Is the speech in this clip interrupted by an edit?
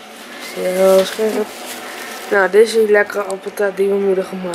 no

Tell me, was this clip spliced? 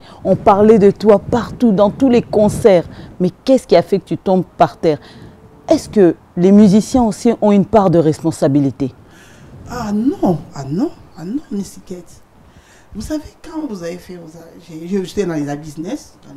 no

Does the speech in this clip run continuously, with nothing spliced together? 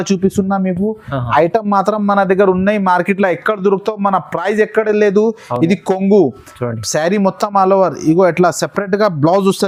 yes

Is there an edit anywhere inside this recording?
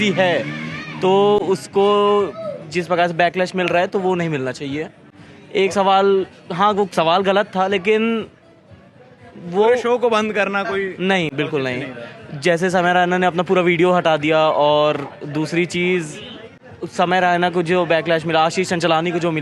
no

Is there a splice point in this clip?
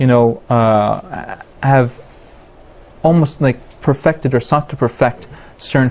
yes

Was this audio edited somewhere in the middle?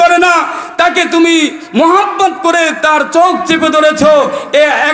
no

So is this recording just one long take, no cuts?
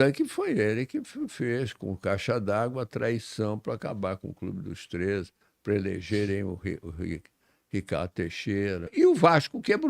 no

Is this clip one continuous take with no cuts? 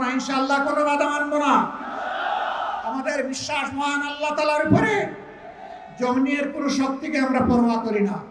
yes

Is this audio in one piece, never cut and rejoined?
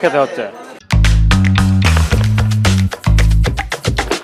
yes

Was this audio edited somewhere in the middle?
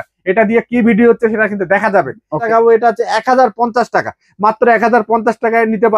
yes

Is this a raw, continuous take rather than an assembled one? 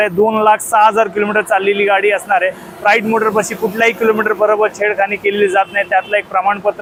yes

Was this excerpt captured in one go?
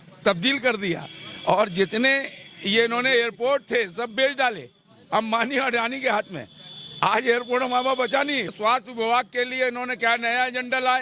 no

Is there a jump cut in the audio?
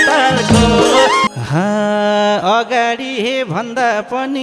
yes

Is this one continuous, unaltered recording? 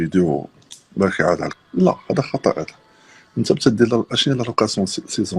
no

